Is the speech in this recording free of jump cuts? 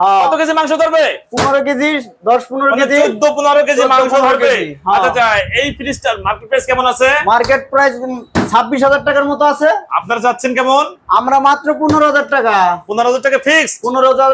yes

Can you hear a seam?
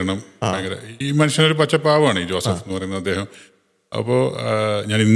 no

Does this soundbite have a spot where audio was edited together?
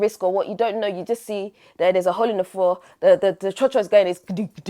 no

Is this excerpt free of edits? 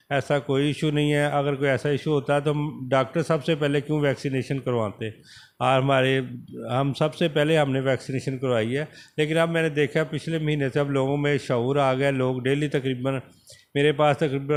yes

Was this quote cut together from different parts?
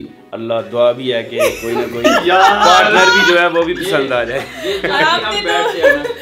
no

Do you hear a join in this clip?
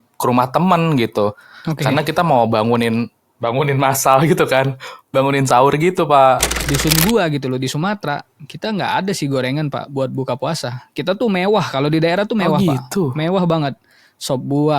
yes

